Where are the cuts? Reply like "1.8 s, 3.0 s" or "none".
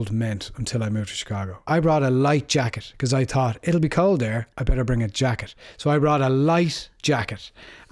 1.6 s